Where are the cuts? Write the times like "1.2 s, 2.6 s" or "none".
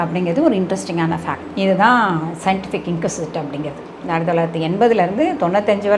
1.4 s

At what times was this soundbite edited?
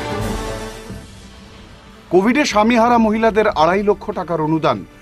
0.9 s

